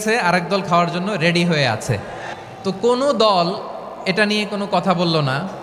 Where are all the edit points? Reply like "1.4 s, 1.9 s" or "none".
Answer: 2.3 s